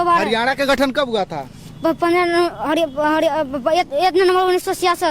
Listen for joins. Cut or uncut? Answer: uncut